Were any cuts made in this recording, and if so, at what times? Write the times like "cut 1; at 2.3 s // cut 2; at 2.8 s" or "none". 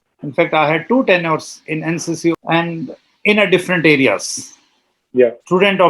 cut 1; at 2.3 s